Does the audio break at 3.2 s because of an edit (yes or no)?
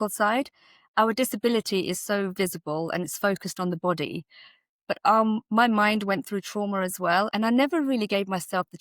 no